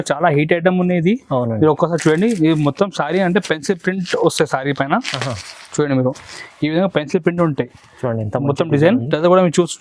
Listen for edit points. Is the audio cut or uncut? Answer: uncut